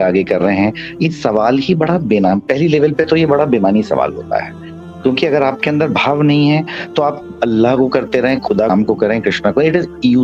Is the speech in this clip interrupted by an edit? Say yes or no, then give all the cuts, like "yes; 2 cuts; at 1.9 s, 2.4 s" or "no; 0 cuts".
no; 0 cuts